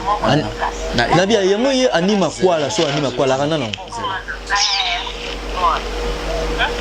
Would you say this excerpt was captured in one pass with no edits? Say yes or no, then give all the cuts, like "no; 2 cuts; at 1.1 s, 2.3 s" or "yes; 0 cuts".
yes; 0 cuts